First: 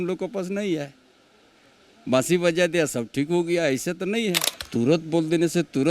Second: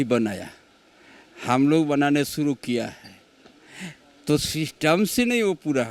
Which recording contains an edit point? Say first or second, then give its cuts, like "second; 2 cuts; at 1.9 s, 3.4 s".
first; 1 cut; at 4.5 s